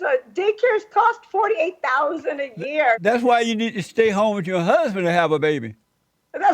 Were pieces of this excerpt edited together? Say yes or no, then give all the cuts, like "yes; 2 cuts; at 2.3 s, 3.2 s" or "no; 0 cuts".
yes; 1 cut; at 3.0 s